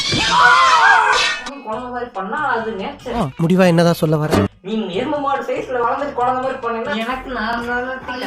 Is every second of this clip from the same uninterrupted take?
no; 2 cuts; at 1.5 s, 6.9 s

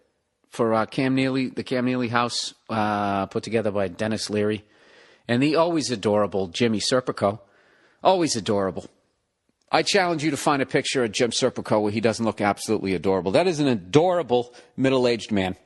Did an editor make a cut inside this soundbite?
no; 0 cuts

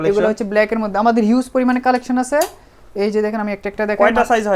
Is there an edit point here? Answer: no; 0 cuts

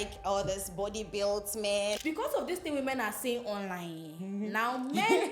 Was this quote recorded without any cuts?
no; 1 cut; at 2.0 s

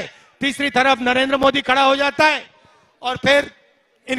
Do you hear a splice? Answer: no; 0 cuts

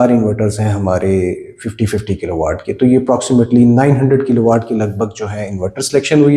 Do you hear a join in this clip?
no; 0 cuts

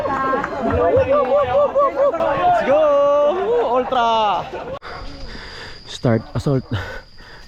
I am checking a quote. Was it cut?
yes; 2 cuts; at 2.2 s, 4.8 s

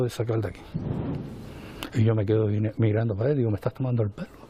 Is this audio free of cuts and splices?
yes; 0 cuts

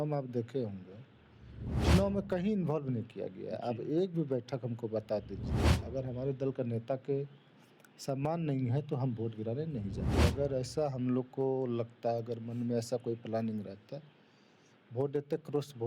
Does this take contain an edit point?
yes; 3 cuts; at 1.7 s, 5.7 s, 10.0 s

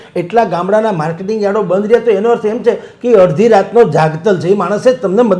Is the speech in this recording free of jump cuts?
yes; 0 cuts

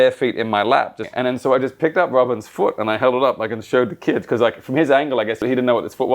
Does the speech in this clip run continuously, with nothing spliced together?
no; 2 cuts; at 1.0 s, 5.4 s

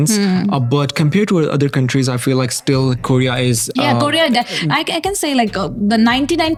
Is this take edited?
no; 0 cuts

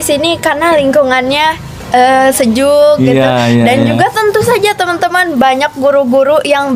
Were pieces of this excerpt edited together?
no; 0 cuts

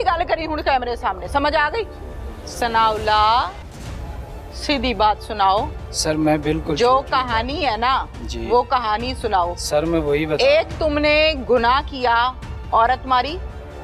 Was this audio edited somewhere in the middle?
yes; 1 cut; at 2.4 s

